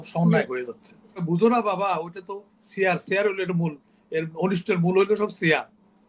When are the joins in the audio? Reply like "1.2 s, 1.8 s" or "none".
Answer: 1.2 s